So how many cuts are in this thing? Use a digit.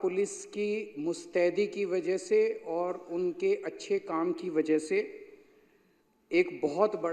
0